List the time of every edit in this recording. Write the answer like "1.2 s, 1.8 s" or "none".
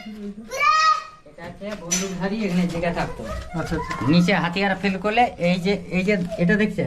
none